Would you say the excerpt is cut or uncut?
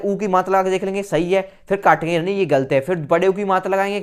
uncut